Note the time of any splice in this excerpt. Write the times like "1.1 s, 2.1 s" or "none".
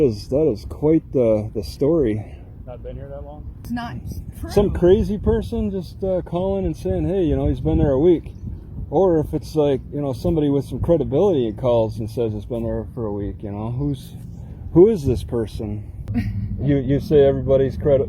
3.7 s, 16.0 s